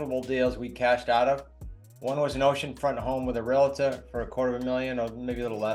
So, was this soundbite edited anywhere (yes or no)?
no